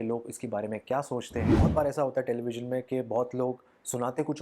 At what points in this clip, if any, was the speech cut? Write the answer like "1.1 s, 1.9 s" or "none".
1.5 s